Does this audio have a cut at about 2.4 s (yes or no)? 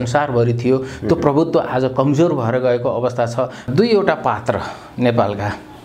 no